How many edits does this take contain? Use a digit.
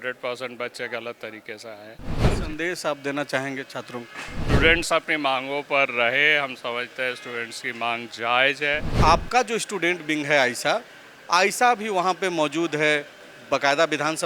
3